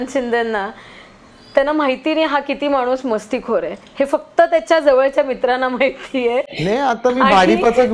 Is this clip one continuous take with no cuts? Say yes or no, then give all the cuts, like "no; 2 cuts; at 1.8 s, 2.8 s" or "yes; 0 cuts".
yes; 0 cuts